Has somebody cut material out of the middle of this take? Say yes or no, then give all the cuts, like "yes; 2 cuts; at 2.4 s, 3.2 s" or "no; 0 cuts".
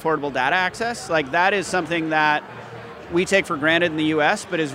no; 0 cuts